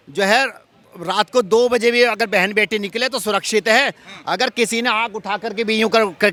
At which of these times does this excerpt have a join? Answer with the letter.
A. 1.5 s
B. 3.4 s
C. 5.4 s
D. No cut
D